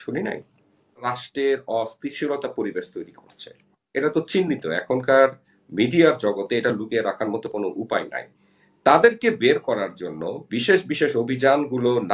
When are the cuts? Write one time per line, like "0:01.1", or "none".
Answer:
0:01.2